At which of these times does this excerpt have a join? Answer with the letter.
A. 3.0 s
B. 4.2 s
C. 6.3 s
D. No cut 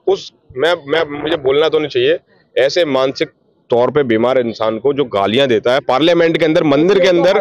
D